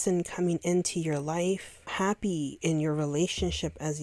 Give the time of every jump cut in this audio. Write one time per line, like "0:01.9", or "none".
0:01.9